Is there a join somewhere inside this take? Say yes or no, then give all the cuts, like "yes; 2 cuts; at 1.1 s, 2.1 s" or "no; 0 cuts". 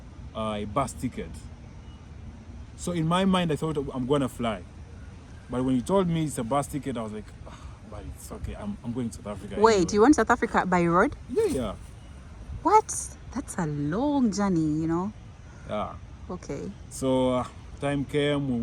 no; 0 cuts